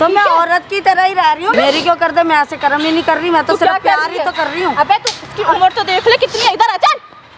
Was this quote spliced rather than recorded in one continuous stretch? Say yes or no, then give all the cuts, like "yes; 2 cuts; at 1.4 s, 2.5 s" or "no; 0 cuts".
yes; 1 cut; at 1.5 s